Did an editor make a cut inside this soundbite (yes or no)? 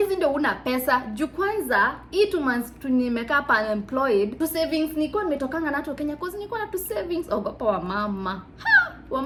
no